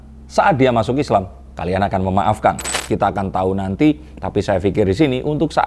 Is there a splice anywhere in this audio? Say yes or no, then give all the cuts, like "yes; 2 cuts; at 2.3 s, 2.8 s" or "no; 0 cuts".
yes; 1 cut; at 2.7 s